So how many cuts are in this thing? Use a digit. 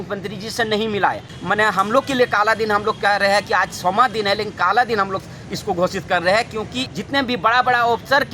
2